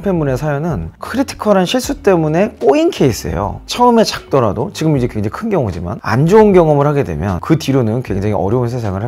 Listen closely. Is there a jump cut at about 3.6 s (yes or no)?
yes